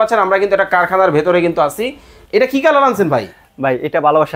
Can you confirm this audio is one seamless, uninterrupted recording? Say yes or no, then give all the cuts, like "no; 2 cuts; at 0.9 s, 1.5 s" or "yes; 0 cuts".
no; 1 cut; at 2.2 s